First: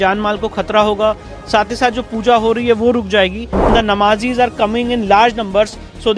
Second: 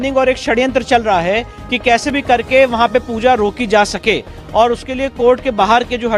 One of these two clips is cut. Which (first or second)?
first